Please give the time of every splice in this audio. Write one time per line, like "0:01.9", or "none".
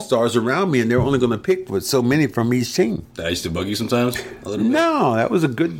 0:03.1